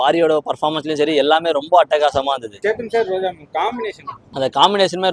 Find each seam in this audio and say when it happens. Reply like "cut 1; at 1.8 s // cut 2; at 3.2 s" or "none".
none